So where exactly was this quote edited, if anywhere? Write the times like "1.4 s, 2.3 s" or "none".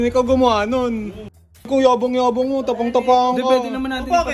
1.6 s